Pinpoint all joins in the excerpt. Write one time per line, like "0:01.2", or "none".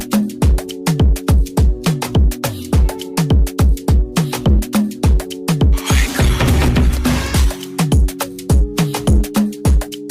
0:07.9